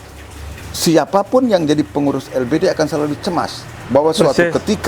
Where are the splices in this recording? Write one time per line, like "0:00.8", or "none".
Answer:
none